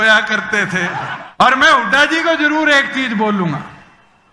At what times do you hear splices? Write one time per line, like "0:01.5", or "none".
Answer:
0:01.2